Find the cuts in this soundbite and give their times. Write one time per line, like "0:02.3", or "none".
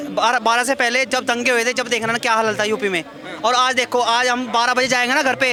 none